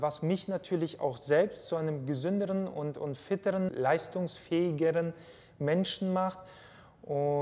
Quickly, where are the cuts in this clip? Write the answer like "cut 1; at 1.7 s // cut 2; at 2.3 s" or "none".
cut 1; at 3.7 s

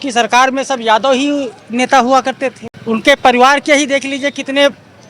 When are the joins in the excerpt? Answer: cut 1; at 2.7 s

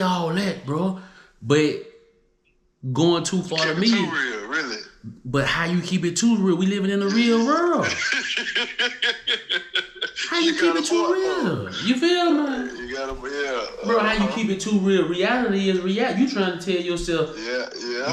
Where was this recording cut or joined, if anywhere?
none

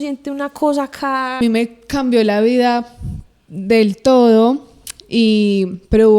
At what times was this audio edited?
cut 1; at 1.4 s

